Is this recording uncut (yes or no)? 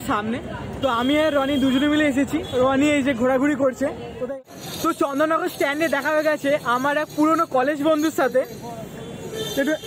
no